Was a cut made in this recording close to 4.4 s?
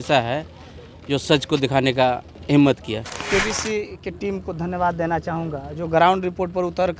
no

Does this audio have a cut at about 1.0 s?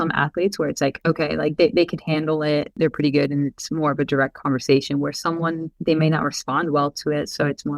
yes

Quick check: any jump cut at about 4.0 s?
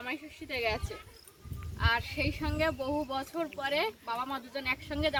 no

